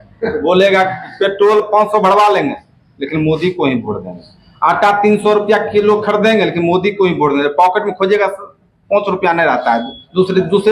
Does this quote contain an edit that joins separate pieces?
yes; 1 cut; at 2.3 s

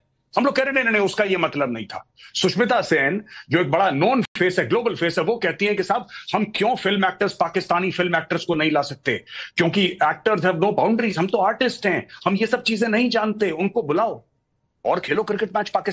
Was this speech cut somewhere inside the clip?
no; 0 cuts

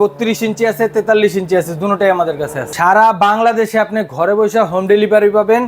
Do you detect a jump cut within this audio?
yes; 1 cut; at 2.6 s

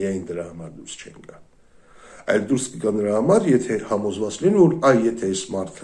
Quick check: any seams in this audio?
no; 0 cuts

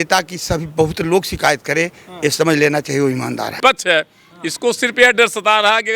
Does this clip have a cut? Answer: yes; 1 cut; at 3.6 s

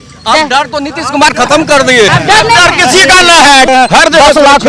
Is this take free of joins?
no; 2 cuts; at 2.1 s, 3.7 s

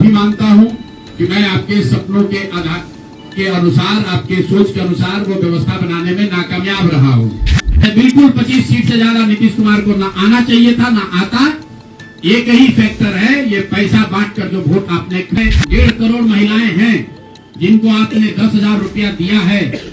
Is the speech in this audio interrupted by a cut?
yes; 2 cuts; at 7.9 s, 15.4 s

